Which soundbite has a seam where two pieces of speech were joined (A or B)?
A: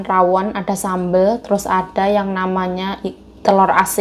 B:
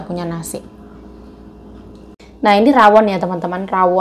B